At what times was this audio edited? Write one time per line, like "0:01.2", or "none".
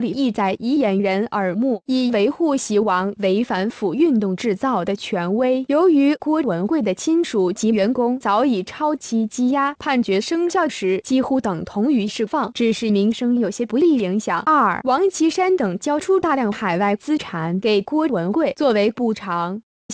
0:06.4